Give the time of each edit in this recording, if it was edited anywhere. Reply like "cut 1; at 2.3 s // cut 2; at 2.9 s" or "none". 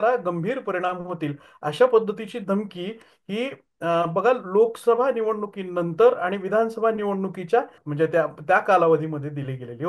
cut 1; at 7.8 s